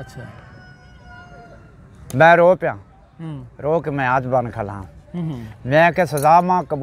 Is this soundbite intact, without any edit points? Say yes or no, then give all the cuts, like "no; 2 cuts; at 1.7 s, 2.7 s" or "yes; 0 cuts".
yes; 0 cuts